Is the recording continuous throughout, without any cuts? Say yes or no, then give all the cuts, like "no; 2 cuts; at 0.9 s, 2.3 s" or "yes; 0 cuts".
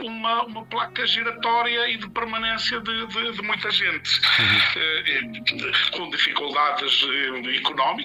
yes; 0 cuts